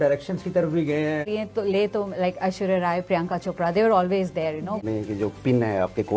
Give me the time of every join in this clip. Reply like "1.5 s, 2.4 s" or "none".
1.3 s, 4.8 s